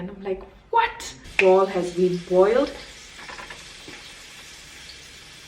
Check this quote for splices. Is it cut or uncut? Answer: cut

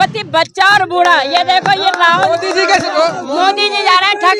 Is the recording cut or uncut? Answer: cut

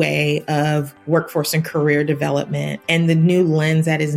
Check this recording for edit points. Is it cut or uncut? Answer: cut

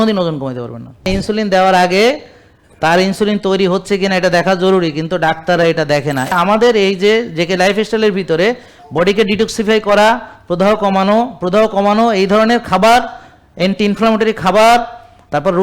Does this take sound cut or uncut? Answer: cut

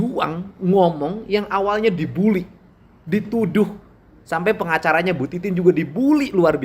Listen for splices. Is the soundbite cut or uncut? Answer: uncut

